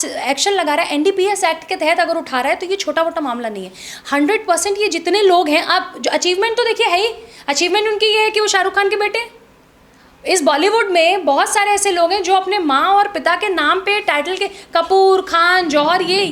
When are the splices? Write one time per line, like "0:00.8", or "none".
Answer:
none